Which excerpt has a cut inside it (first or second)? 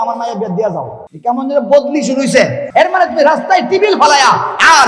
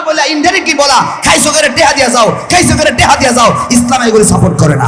first